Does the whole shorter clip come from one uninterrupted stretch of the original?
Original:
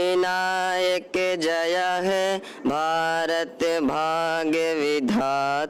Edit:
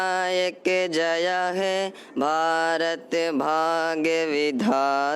yes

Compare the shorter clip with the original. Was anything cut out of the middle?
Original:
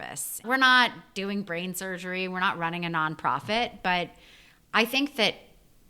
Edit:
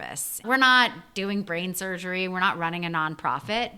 no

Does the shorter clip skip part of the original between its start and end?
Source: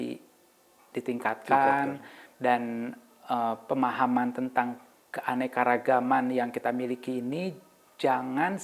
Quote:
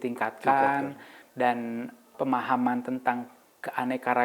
yes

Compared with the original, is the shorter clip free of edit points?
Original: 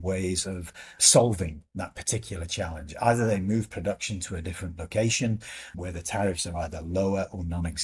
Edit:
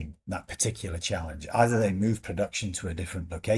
yes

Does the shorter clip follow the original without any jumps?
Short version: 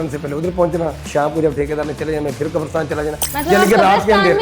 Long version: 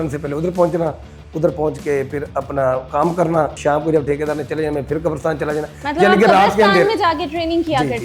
no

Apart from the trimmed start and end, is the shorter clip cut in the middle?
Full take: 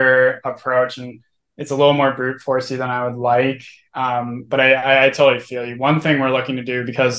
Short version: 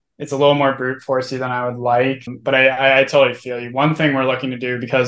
yes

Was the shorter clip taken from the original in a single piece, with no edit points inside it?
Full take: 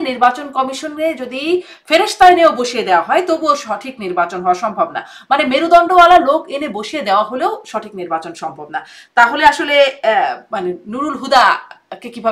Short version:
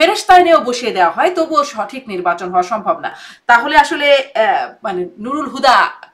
no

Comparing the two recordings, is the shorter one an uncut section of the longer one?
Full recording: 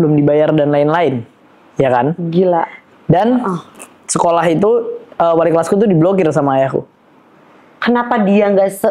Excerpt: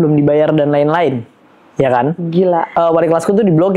no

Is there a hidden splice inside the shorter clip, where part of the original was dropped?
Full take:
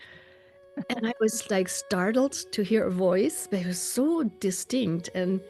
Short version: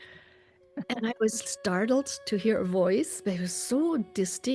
yes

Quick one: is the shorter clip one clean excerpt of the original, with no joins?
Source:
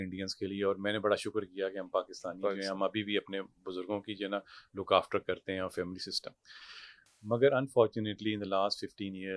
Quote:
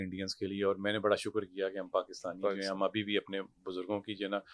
yes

